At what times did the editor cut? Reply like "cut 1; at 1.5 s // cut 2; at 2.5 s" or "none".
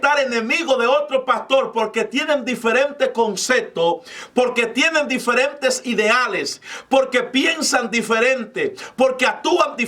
none